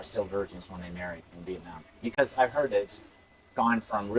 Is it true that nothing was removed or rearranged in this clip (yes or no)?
yes